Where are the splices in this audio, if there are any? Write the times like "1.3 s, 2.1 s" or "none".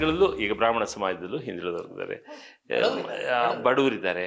none